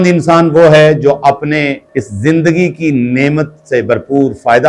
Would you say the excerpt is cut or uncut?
uncut